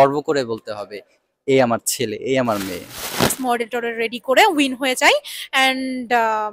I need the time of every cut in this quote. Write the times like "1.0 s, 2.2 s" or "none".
3.3 s